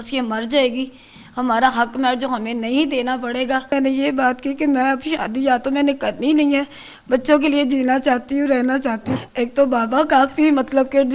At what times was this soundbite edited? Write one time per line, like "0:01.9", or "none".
0:03.7
0:09.1